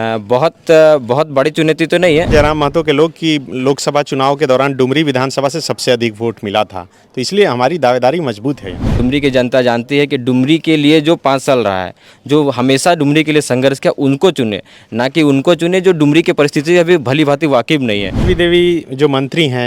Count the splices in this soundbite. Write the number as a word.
three